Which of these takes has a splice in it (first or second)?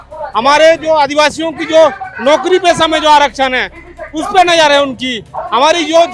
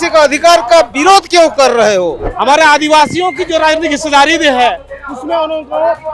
second